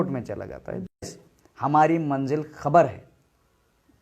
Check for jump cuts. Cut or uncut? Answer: cut